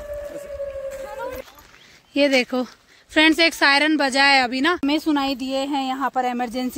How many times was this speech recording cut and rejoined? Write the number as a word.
one